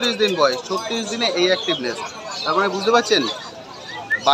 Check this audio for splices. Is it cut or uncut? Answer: uncut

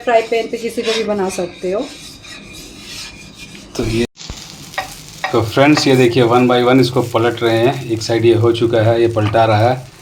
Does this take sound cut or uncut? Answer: cut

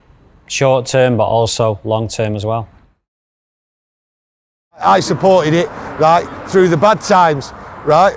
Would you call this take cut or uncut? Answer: uncut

